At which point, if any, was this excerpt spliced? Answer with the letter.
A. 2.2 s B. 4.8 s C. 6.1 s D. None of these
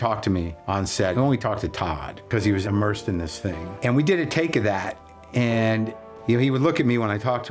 C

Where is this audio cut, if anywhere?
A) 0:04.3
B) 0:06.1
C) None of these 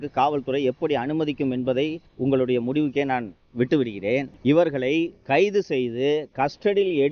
A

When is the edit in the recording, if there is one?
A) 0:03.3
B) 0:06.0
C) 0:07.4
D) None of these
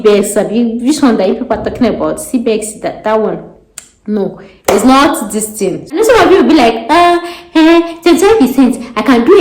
B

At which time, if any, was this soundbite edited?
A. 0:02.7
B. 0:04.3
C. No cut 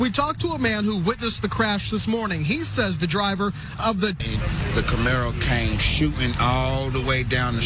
B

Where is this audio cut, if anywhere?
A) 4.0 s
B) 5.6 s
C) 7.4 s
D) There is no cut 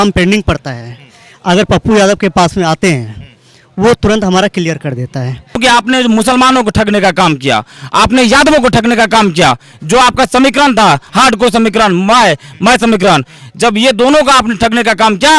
B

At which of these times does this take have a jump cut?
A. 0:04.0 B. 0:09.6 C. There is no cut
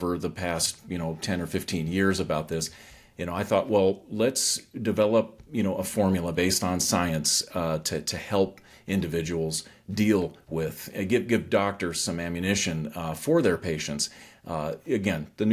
C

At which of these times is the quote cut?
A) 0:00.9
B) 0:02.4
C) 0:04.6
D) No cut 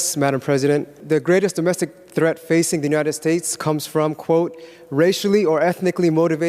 A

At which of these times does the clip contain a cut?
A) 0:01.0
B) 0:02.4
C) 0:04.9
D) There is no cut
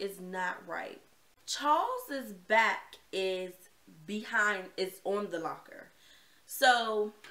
D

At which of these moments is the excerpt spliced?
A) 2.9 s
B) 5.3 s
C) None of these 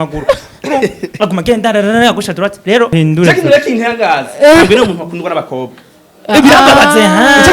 A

